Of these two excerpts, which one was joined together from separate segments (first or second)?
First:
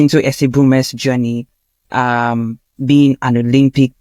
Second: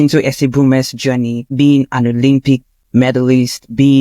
second